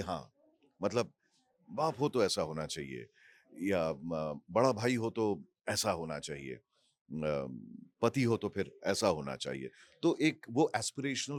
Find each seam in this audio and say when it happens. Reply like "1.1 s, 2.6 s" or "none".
none